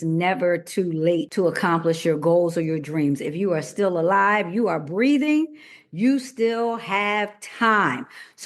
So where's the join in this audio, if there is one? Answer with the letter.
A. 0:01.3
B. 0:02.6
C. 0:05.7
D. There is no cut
A